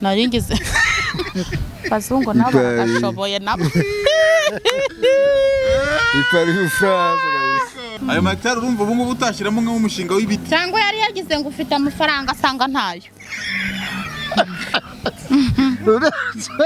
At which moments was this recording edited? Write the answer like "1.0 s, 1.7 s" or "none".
7.9 s